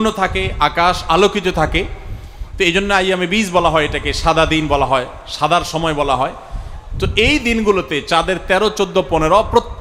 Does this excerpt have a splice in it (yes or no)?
no